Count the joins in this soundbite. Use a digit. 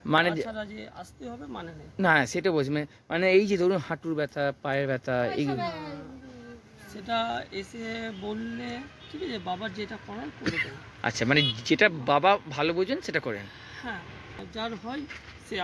1